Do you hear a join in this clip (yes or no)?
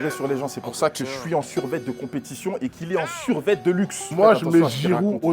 yes